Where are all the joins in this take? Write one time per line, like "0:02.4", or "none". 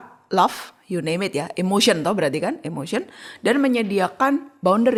none